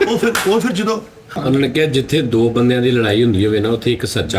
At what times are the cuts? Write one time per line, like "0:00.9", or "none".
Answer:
0:01.4